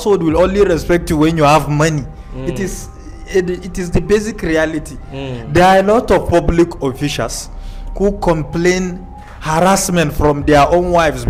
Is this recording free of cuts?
yes; 0 cuts

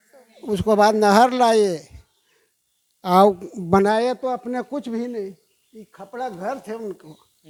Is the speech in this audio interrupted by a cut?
no; 0 cuts

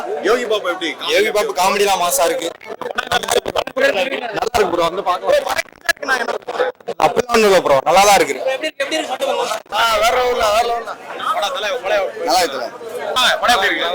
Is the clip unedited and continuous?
yes; 0 cuts

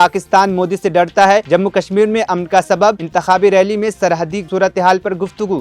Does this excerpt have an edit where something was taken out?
no; 0 cuts

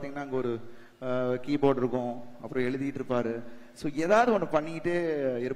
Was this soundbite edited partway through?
no; 0 cuts

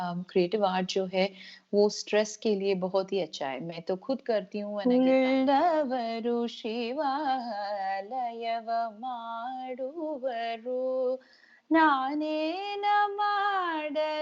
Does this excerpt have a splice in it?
yes; 1 cut; at 4.8 s

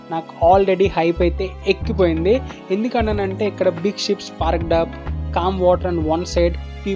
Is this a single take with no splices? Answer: yes; 0 cuts

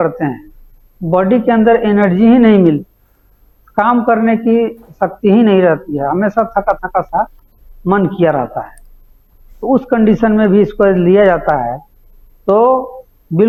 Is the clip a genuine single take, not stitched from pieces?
yes; 0 cuts

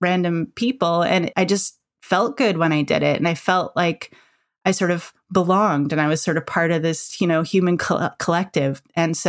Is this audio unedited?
no; 1 cut; at 1.3 s

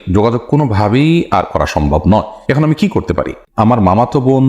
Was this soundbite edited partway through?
yes; 1 cut; at 3.5 s

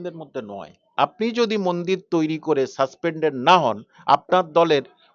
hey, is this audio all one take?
no; 1 cut; at 0.9 s

